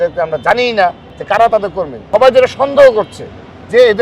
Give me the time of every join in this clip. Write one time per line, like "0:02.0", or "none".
0:01.9